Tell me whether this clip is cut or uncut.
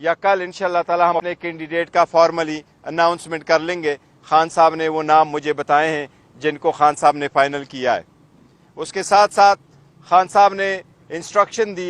cut